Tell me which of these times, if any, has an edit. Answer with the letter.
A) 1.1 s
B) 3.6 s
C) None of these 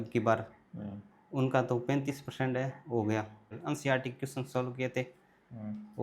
B